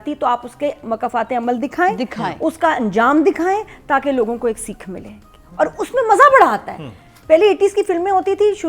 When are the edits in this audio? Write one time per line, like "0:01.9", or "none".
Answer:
none

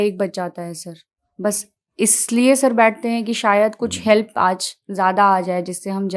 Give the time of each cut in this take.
none

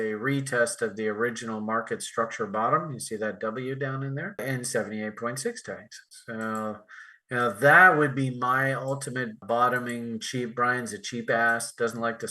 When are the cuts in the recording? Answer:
0:04.4
0:09.4

